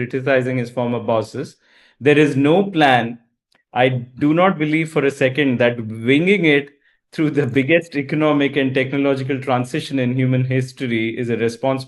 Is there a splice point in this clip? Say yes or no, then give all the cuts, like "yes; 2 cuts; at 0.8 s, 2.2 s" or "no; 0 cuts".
no; 0 cuts